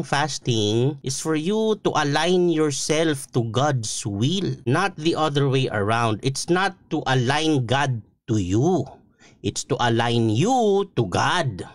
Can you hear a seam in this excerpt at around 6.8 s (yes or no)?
no